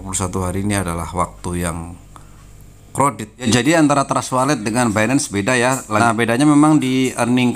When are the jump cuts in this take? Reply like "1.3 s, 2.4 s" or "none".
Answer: 3.5 s, 6.0 s